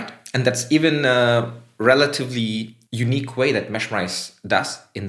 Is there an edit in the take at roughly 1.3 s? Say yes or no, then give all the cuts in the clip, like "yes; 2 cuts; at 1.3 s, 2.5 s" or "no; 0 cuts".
no; 1 cut; at 2.8 s